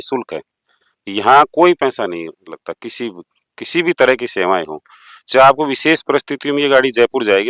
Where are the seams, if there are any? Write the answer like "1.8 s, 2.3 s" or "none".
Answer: none